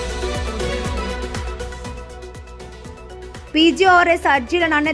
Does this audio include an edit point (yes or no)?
yes